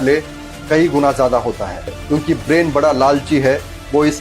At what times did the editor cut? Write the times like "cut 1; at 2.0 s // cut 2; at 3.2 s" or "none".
cut 1; at 1.9 s